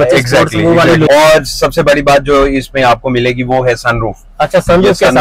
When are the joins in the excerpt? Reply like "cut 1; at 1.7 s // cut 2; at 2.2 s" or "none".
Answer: cut 1; at 1.1 s